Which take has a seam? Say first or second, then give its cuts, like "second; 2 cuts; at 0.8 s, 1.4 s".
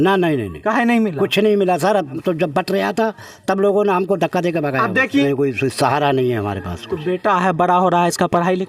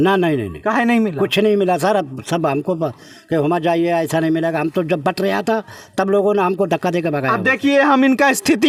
first; 2 cuts; at 2.2 s, 5.2 s